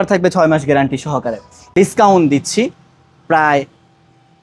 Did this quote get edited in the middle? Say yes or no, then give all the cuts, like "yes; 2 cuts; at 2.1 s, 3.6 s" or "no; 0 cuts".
yes; 1 cut; at 1.6 s